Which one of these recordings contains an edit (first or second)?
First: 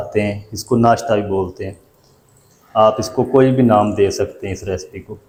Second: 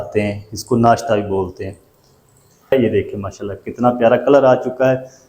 second